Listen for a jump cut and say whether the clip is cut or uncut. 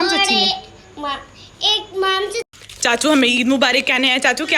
cut